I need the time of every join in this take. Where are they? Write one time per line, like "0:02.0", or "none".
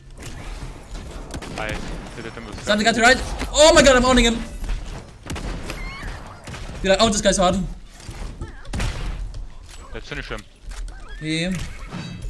none